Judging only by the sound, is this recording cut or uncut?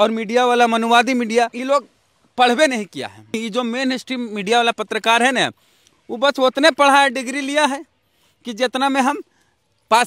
cut